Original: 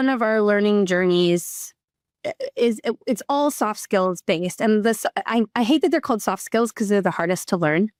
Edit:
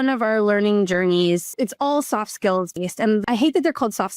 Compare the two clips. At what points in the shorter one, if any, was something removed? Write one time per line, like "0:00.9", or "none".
0:01.5
0:03.2